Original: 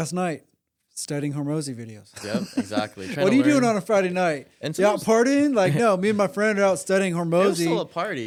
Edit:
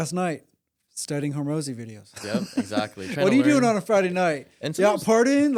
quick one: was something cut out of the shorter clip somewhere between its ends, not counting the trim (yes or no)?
no